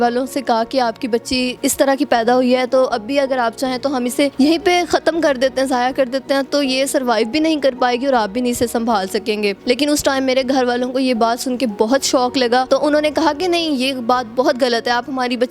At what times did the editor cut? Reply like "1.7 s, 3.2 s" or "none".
1.5 s, 4.3 s, 9.6 s, 12.7 s